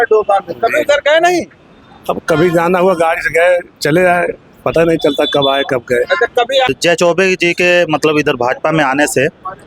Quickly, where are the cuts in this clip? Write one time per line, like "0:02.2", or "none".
0:06.7